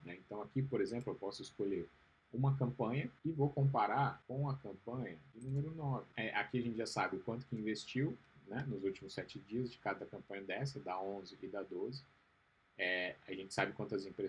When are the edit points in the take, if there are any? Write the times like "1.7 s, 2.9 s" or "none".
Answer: 3.1 s, 4.2 s, 5.3 s, 6.1 s